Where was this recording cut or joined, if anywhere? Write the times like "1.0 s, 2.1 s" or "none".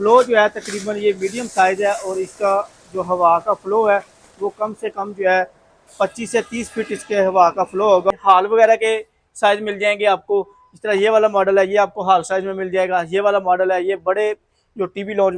8.1 s